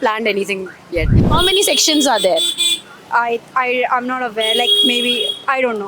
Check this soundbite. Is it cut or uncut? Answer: cut